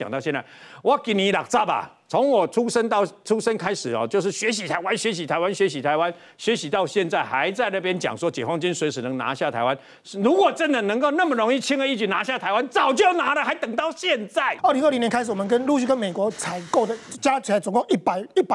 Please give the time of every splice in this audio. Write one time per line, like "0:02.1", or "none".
0:14.5